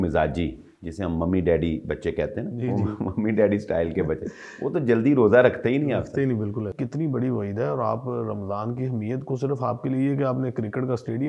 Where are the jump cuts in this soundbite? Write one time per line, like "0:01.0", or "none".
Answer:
0:06.7